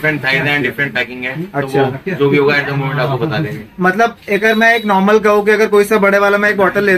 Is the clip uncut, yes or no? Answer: yes